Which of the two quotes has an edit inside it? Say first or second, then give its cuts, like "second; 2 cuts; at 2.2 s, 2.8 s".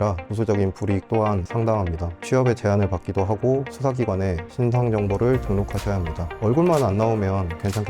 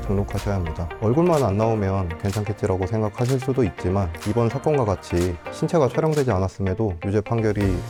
first; 2 cuts; at 1.5 s, 4.4 s